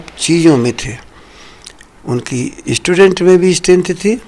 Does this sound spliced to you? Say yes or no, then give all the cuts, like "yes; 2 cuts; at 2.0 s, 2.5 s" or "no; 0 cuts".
no; 0 cuts